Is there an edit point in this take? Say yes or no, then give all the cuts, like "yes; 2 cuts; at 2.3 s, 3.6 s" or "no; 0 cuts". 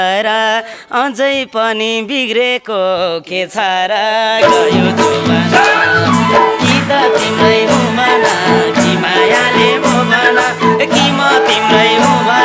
no; 0 cuts